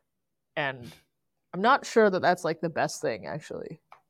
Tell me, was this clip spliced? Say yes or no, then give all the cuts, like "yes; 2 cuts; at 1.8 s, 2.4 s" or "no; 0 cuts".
no; 0 cuts